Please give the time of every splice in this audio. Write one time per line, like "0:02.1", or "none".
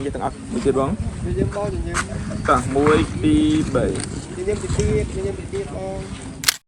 none